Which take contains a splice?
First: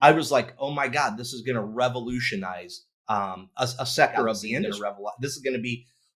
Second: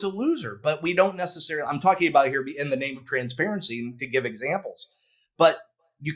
first; 1 cut; at 4.7 s

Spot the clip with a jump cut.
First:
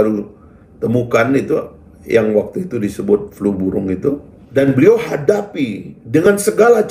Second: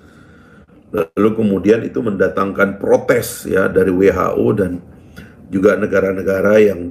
first; 1 cut; at 4.3 s

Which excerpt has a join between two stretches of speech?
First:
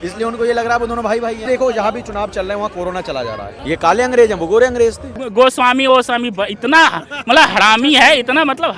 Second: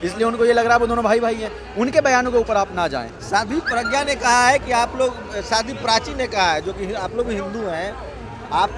first; 3 cuts; at 1.4 s, 3.5 s, 5.2 s

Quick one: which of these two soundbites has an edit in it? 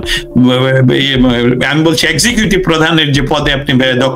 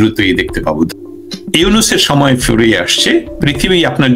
second; 1 cut; at 0.9 s

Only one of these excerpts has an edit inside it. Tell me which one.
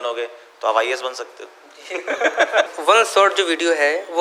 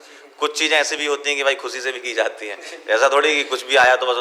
first; 1 cut; at 2.7 s

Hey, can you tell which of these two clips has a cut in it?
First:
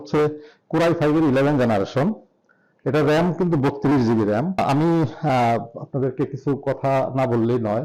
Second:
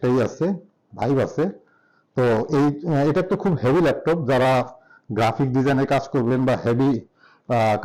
first; 1 cut; at 4.6 s

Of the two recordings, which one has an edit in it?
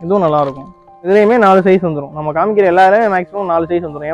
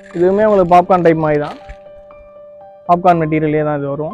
first; 1 cut; at 1.1 s

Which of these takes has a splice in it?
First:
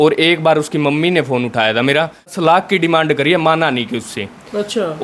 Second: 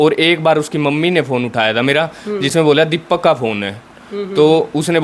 first; 1 cut; at 2.3 s

